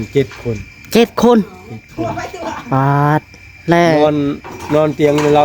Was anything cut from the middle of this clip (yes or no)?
no